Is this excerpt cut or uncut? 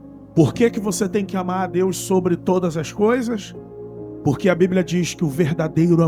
uncut